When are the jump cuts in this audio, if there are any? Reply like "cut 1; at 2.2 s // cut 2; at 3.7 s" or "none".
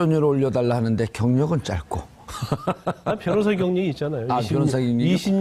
cut 1; at 2.0 s